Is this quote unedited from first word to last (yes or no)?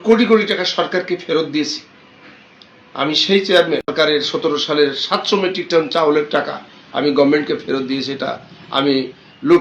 no